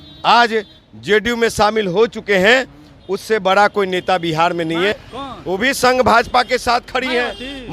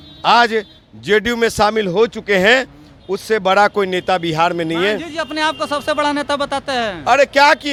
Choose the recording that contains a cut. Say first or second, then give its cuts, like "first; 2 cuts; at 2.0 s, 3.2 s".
first; 1 cut; at 5.1 s